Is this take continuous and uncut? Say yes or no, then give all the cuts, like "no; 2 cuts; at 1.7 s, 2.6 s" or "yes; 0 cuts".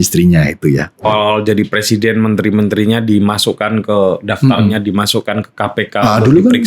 no; 1 cut; at 1.1 s